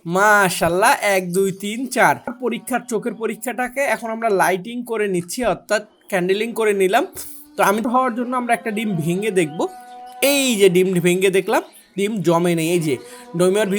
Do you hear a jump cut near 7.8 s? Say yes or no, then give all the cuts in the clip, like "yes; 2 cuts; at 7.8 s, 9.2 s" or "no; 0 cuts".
yes; 2 cuts; at 2.4 s, 7.8 s